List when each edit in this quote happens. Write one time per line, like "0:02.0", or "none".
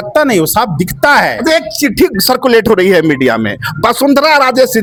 none